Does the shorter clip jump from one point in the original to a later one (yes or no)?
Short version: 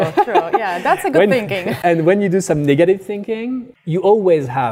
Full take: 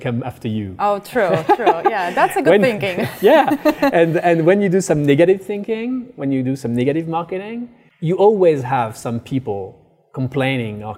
yes